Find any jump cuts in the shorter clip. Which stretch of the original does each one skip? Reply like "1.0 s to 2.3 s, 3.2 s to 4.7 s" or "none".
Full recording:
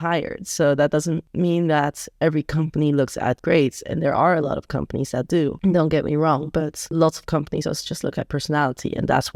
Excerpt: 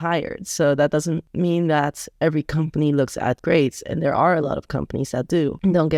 none